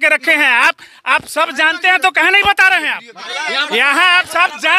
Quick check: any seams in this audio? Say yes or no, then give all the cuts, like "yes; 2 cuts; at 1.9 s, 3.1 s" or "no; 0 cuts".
yes; 1 cut; at 3.3 s